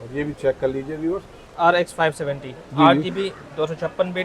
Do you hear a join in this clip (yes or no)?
yes